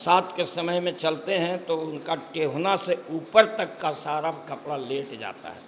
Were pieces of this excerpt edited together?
no; 0 cuts

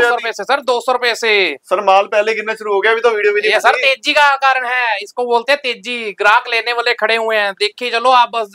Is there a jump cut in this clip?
no; 0 cuts

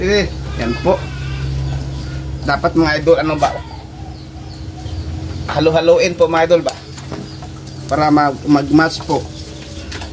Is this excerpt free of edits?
yes; 0 cuts

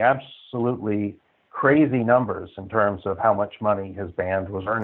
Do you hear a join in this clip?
no; 0 cuts

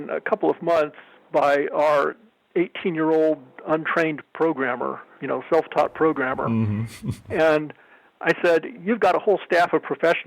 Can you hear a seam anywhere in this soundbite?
no; 0 cuts

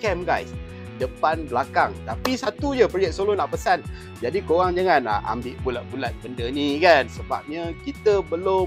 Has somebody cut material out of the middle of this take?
yes; 2 cuts; at 2.0 s, 7.1 s

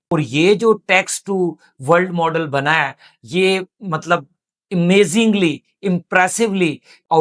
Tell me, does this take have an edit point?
no; 0 cuts

